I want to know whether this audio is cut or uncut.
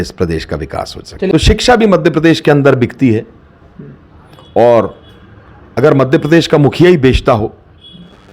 cut